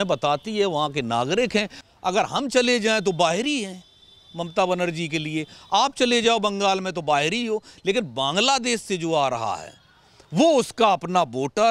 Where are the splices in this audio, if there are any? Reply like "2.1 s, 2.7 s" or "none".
1.8 s